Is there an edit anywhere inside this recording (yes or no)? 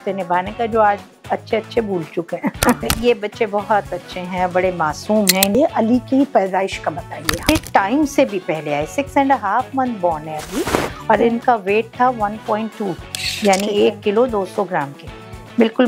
yes